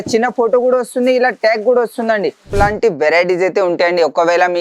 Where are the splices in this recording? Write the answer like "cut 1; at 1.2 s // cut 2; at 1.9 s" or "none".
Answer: cut 1; at 2.5 s